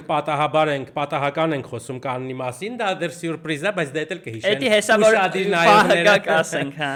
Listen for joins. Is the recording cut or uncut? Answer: uncut